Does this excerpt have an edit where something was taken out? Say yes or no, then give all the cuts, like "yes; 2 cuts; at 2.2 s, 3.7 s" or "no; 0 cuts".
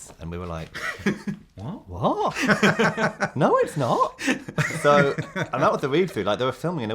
no; 0 cuts